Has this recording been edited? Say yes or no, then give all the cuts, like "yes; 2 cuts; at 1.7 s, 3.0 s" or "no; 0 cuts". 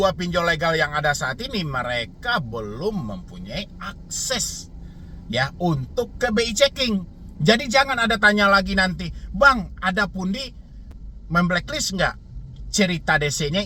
no; 0 cuts